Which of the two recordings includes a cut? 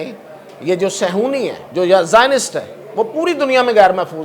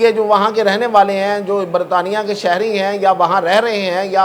first; 1 cut; at 1.6 s

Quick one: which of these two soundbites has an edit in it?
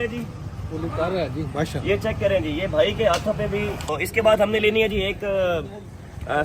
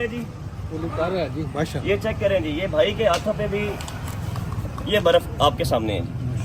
first; 1 cut; at 3.9 s

